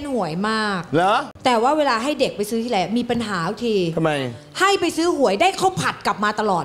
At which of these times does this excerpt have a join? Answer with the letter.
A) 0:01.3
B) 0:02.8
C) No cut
A